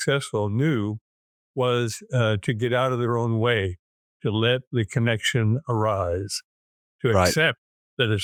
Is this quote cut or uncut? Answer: uncut